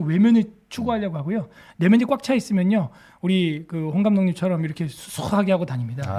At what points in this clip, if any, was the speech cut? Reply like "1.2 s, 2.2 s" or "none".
none